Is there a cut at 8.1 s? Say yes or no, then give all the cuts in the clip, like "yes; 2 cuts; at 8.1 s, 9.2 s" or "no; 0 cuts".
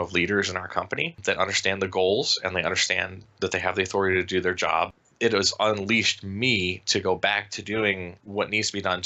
yes; 3 cuts; at 1.2 s, 5.0 s, 8.1 s